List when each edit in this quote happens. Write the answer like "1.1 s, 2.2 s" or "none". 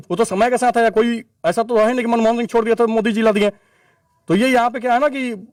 none